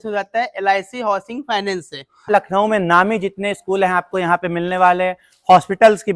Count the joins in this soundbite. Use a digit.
1